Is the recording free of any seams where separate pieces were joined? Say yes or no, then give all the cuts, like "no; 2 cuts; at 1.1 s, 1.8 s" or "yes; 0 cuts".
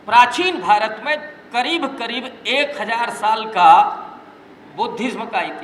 yes; 0 cuts